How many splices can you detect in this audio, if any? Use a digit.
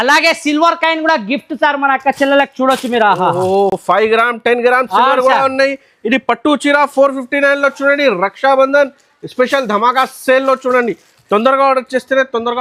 0